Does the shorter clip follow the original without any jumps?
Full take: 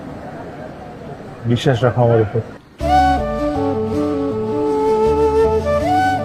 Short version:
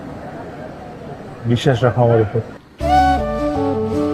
yes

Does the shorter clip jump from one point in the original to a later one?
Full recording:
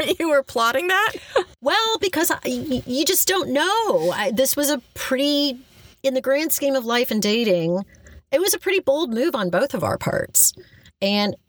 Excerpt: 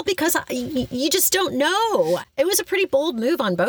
yes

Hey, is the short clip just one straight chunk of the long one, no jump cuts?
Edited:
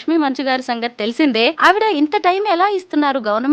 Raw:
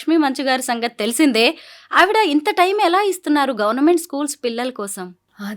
no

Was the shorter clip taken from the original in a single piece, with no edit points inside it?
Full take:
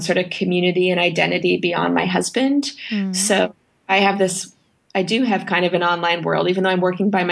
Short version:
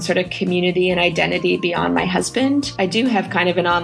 no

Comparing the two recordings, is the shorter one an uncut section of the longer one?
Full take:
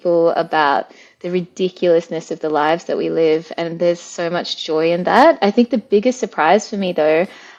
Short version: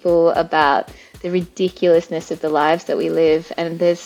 yes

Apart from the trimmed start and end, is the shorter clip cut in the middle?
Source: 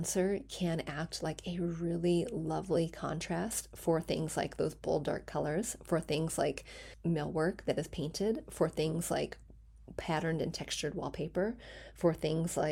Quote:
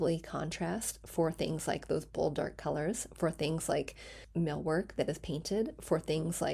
no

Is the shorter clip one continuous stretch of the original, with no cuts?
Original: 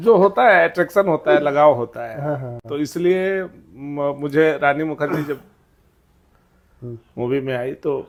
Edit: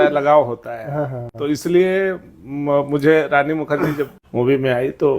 no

